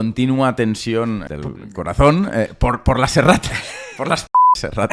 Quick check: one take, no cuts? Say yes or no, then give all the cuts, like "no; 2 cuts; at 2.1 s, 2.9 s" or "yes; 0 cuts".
no; 1 cut; at 1.2 s